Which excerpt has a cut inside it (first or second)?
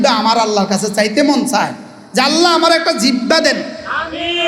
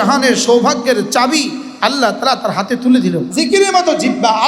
second